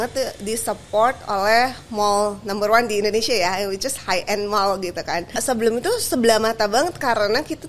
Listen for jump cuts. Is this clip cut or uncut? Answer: cut